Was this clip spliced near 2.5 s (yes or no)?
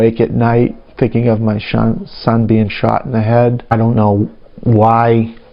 no